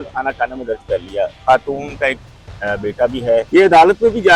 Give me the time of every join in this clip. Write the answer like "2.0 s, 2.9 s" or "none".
1.4 s, 3.5 s